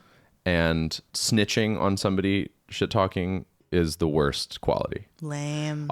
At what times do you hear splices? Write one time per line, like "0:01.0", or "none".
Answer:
0:01.1
0:03.6